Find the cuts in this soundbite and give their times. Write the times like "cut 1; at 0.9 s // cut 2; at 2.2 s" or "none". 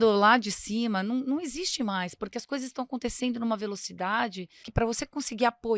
cut 1; at 4.7 s

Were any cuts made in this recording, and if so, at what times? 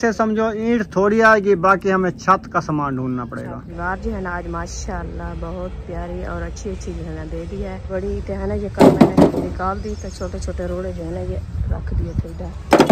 cut 1; at 3.7 s // cut 2; at 7.9 s

